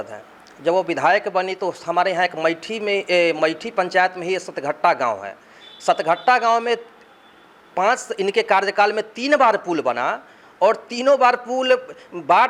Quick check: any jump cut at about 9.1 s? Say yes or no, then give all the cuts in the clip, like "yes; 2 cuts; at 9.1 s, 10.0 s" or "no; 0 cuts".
no; 0 cuts